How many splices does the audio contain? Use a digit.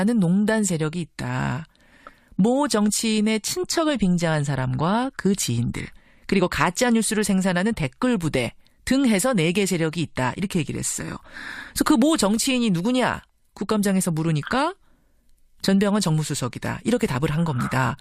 0